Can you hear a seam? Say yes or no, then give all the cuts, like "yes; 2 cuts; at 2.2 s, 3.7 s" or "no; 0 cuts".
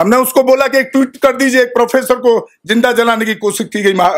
no; 0 cuts